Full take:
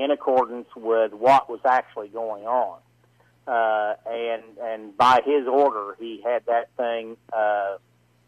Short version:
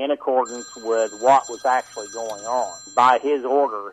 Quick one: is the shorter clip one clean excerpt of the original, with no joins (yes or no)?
no